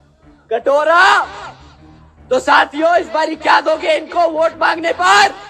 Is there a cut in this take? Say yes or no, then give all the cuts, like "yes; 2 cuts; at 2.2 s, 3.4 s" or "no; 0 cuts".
no; 0 cuts